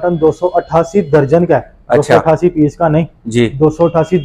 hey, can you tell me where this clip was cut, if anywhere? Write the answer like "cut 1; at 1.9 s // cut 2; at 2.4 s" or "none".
none